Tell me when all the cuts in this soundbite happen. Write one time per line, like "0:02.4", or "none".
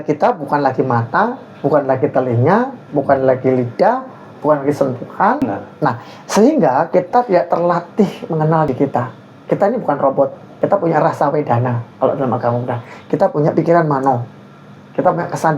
0:05.4
0:08.7
0:10.4